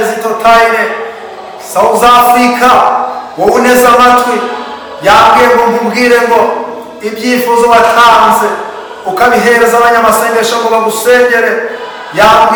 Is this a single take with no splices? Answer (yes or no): yes